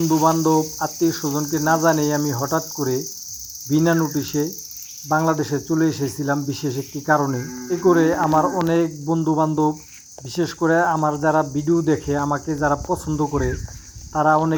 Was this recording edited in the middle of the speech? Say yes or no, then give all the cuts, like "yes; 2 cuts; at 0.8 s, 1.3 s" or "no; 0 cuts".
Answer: no; 0 cuts